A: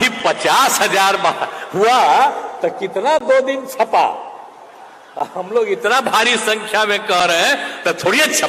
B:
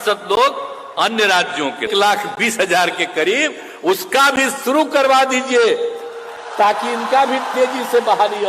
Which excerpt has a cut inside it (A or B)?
B